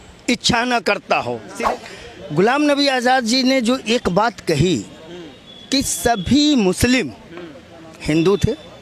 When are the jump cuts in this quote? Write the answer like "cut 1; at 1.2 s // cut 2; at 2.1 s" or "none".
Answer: cut 1; at 1.5 s